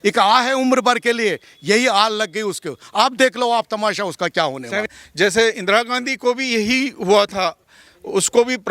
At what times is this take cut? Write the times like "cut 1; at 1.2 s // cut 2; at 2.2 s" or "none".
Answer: cut 1; at 4.9 s

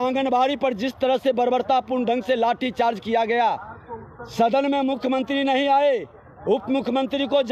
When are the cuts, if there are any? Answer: none

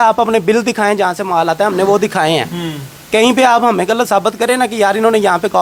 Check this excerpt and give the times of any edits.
none

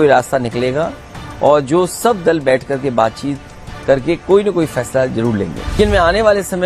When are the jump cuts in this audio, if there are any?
cut 1; at 5.8 s

